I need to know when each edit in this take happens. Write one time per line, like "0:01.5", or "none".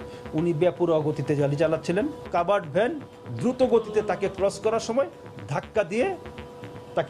none